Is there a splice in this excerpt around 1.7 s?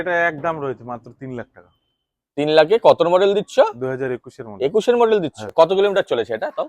no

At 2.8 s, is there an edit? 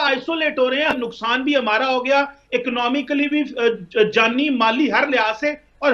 no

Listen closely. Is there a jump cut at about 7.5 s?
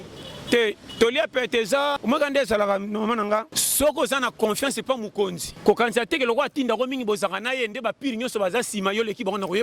no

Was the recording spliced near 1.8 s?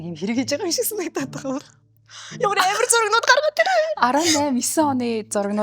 yes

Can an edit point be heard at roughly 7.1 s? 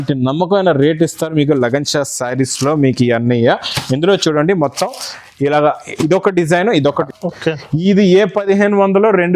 yes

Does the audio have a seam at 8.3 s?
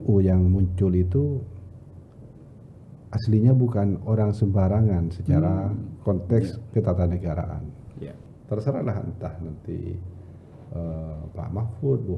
yes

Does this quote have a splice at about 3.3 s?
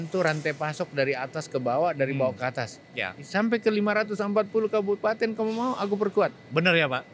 yes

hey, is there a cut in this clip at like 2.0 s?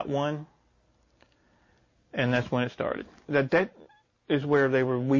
no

